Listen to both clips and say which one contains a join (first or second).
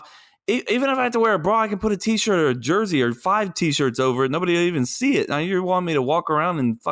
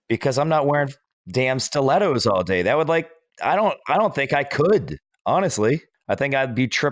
second